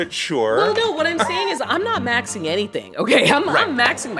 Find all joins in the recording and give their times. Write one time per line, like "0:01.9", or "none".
none